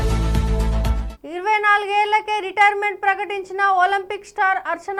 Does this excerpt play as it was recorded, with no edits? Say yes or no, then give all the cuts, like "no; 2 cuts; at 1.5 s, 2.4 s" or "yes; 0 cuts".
yes; 0 cuts